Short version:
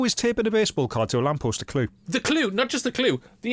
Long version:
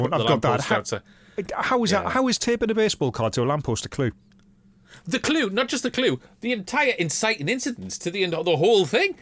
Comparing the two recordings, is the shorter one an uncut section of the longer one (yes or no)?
no